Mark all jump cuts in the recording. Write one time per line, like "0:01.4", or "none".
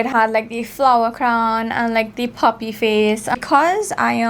0:03.3